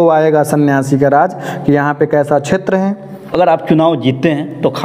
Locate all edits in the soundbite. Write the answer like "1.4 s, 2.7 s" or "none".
3.2 s